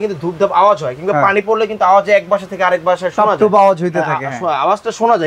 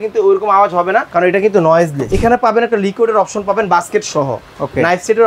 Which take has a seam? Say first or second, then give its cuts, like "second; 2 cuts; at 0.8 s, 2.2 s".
second; 2 cuts; at 1.1 s, 2.0 s